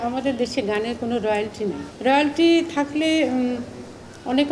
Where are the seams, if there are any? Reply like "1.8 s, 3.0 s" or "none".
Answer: 1.9 s

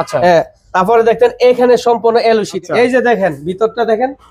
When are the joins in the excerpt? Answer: 2.5 s

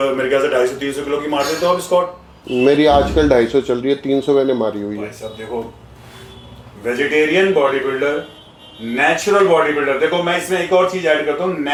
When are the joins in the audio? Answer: none

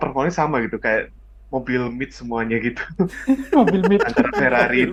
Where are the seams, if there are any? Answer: none

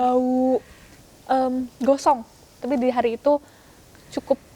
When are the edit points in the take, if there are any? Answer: 2.6 s

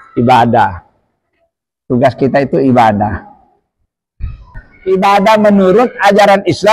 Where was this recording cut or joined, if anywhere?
4.7 s

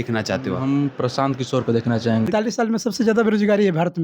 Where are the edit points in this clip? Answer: 2.3 s

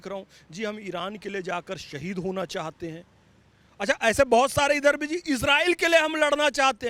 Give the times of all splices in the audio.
none

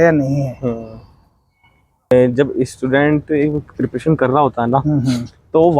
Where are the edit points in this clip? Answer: 2.1 s

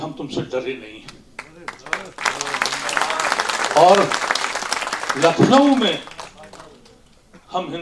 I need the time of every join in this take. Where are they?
none

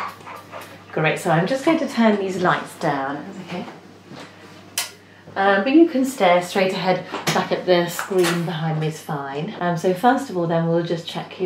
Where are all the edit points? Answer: 9.5 s

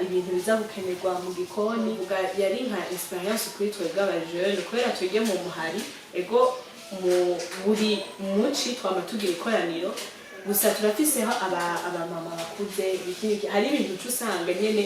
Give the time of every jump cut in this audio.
2.0 s

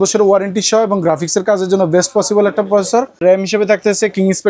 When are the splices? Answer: 3.2 s

